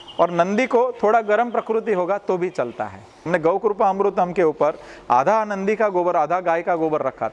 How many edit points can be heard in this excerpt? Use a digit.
1